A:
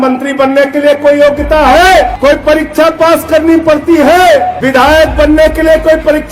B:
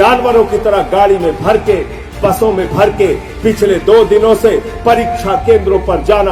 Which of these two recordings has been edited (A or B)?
A